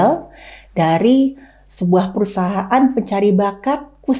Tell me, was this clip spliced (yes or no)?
no